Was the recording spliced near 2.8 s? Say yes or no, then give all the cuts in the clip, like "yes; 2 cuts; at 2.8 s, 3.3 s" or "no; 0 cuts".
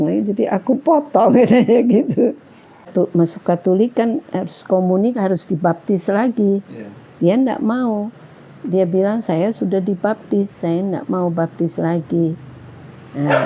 yes; 1 cut; at 2.8 s